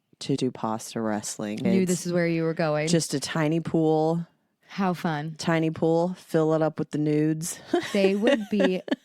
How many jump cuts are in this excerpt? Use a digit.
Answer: 1